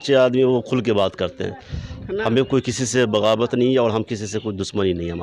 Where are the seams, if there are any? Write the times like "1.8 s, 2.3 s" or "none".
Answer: none